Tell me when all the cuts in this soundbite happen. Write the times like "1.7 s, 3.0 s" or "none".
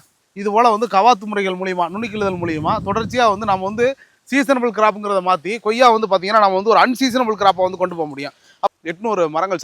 8.7 s